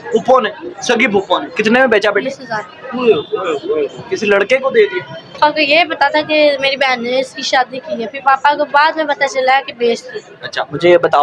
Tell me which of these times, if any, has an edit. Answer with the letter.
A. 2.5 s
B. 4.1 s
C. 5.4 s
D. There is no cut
C